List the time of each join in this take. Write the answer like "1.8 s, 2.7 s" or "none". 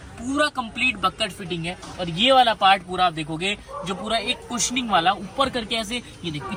none

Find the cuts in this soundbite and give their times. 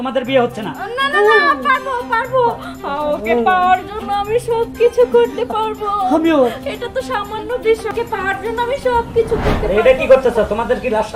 none

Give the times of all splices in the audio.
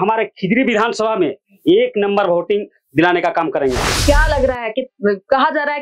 3.9 s

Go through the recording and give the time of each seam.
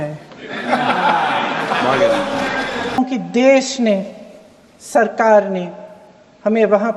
3.0 s

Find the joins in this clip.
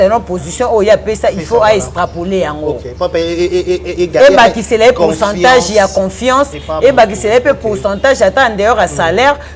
none

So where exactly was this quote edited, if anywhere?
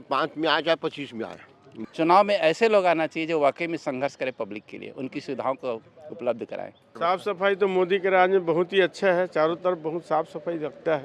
1.8 s, 7.0 s

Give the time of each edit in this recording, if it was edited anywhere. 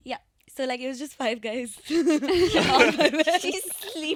none

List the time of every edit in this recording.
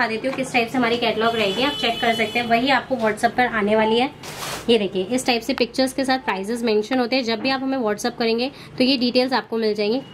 none

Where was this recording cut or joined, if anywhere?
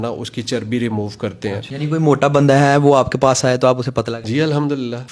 1.7 s, 4.2 s

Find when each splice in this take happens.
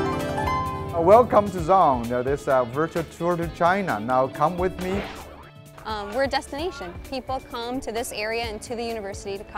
5.4 s

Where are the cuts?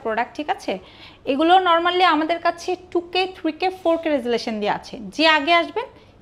none

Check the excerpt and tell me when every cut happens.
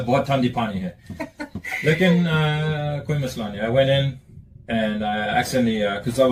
none

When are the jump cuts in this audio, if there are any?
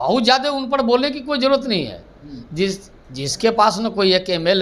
none

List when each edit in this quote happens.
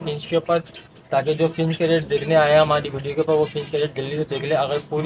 none

